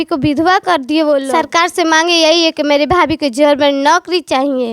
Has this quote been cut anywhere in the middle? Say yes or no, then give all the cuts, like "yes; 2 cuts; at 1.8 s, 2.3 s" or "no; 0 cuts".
yes; 1 cut; at 1.3 s